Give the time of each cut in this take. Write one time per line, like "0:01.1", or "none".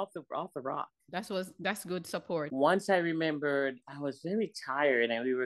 0:02.5